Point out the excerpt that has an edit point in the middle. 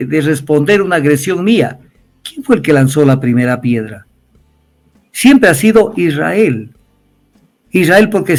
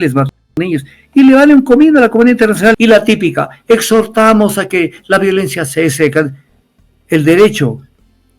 second; 1 cut; at 2.8 s

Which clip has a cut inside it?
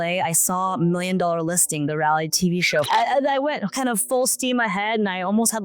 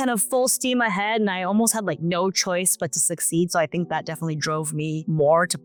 first; 1 cut; at 2.9 s

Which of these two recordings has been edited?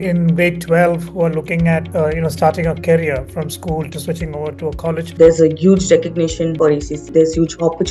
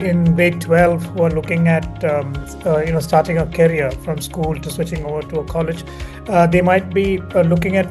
first; 3 cuts; at 1.9 s, 5.1 s, 6.7 s

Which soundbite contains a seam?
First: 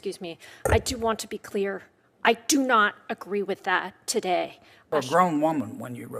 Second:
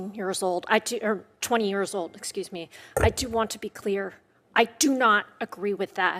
first; 1 cut; at 4.9 s

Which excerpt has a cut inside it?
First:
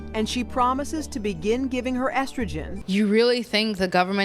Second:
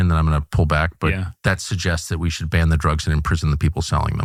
first; 1 cut; at 2.8 s

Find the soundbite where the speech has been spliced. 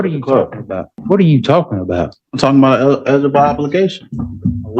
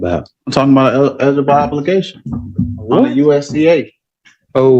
first; 1 cut; at 0.9 s

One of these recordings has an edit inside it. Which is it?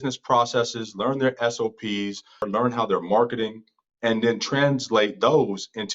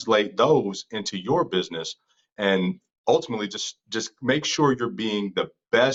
first; 1 cut; at 2.5 s

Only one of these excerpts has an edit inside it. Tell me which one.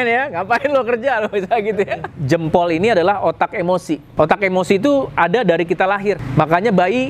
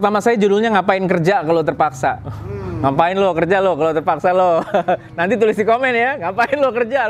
first; 3 cuts; at 2.1 s, 4.1 s, 6.2 s

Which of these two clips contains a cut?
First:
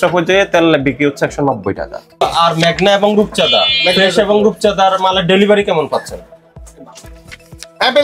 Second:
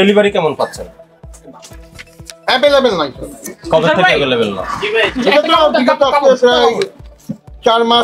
first; 1 cut; at 2.1 s

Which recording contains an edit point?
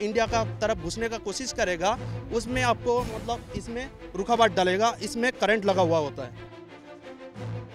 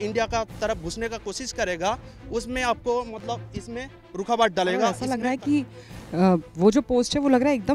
second; 1 cut; at 5.0 s

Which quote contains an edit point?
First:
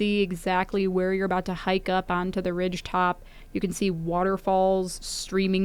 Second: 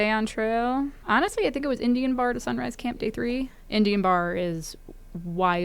second; 2 cuts; at 1.0 s, 3.6 s

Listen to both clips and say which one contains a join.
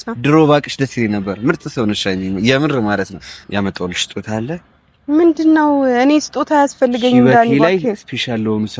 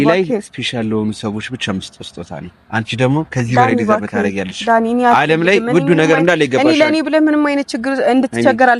first; 1 cut; at 3.4 s

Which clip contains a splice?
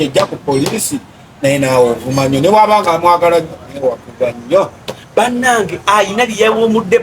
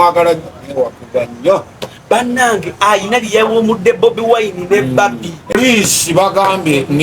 second; 1 cut; at 5.5 s

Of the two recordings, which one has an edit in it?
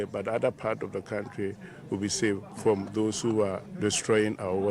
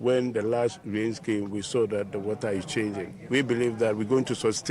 first; 2 cuts; at 2.5 s, 3.6 s

